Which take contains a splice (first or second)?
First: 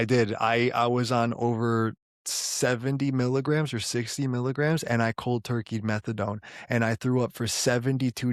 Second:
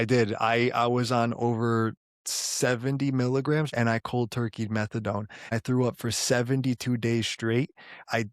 second